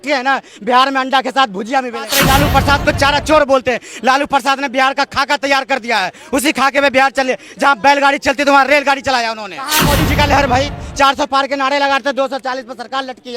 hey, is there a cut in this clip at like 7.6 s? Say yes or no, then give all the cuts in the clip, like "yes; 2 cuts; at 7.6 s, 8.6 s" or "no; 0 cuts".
no; 2 cuts; at 2.1 s, 9.8 s